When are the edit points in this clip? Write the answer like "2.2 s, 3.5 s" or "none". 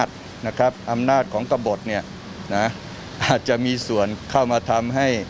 none